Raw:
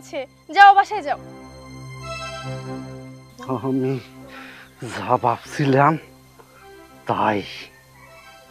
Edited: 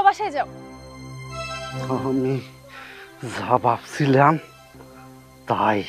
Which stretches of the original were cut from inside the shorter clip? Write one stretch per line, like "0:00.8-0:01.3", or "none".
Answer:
0:02.6-0:03.4